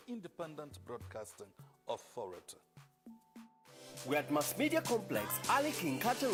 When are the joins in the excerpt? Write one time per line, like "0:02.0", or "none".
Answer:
none